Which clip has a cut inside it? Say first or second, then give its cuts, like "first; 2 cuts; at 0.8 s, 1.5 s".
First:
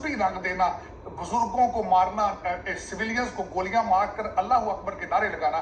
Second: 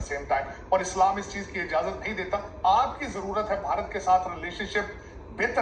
second; 1 cut; at 2.5 s